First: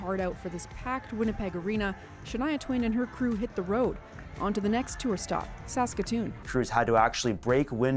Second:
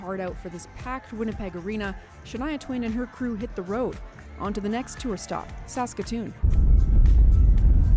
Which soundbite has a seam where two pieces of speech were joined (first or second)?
first